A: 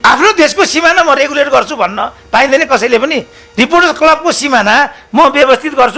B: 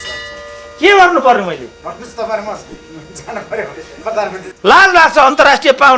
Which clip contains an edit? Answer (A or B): B